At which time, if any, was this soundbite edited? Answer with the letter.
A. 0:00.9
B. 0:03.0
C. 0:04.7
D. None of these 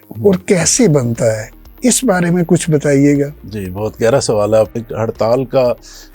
C